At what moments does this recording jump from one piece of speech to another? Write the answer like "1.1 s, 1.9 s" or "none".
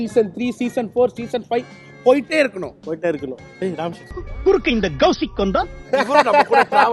none